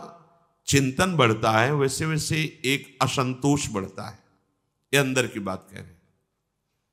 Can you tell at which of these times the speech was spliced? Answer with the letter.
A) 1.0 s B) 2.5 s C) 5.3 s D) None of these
D